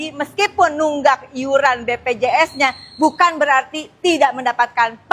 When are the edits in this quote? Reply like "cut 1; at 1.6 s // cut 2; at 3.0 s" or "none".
none